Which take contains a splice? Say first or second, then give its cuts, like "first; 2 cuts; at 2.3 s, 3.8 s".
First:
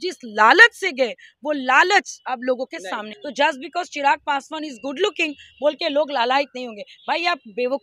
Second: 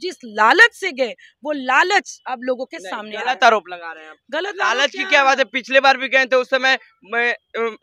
first; 1 cut; at 3.0 s